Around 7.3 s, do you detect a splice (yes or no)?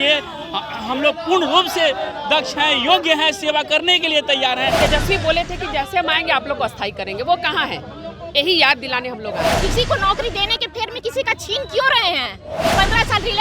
no